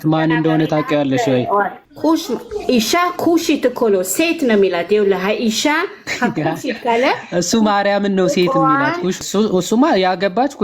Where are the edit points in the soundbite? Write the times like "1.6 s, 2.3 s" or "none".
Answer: 1.8 s, 9.2 s